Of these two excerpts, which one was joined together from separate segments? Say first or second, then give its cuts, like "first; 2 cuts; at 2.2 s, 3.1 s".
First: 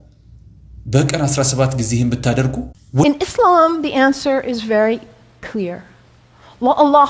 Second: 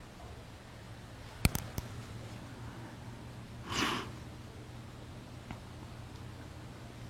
first; 1 cut; at 3.0 s